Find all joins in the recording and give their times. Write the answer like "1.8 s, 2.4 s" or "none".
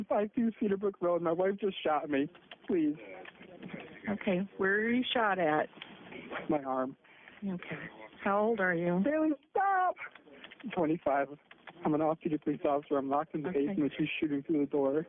2.8 s